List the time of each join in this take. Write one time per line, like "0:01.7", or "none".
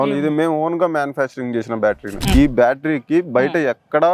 0:02.3